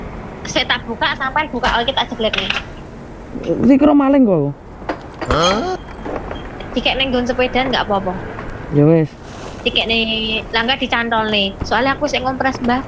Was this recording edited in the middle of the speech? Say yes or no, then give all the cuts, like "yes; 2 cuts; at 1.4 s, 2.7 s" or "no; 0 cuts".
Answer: no; 0 cuts